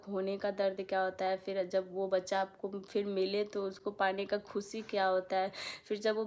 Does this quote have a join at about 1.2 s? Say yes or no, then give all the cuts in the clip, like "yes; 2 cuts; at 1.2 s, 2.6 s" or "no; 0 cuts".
no; 0 cuts